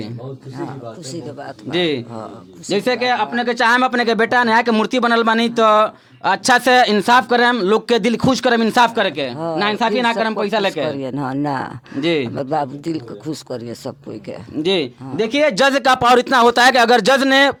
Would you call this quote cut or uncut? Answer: uncut